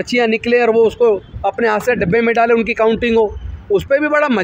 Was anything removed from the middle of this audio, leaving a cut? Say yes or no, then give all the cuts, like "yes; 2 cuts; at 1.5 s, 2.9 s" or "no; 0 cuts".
no; 0 cuts